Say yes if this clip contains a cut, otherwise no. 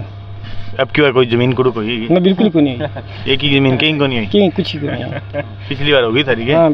no